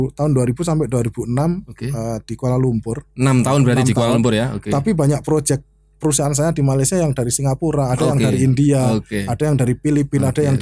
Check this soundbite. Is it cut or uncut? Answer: uncut